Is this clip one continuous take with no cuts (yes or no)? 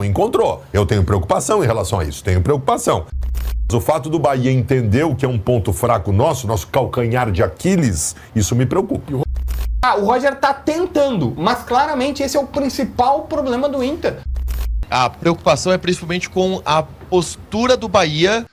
no